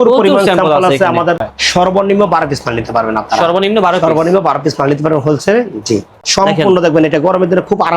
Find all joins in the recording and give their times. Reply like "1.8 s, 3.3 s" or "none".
1.6 s, 6.1 s